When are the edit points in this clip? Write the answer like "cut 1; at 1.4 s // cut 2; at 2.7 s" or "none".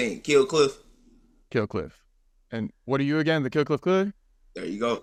none

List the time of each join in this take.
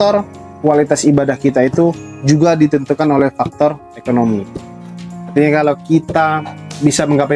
none

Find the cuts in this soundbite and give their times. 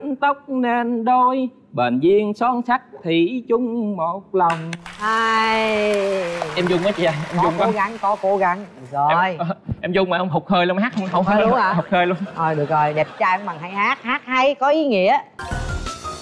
cut 1; at 15.3 s

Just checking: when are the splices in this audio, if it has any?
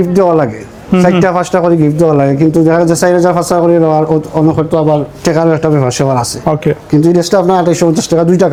none

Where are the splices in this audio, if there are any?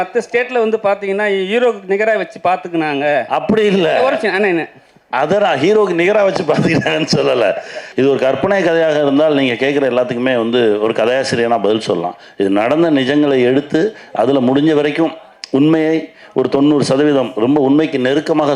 cut 1; at 7.8 s

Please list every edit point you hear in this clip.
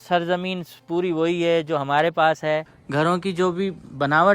cut 1; at 2.7 s

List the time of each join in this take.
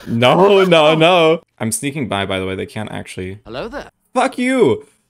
cut 1; at 1.5 s

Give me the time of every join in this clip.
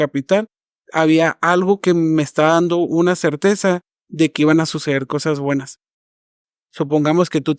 cut 1; at 6.4 s

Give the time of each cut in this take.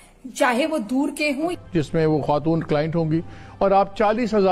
cut 1; at 1.5 s

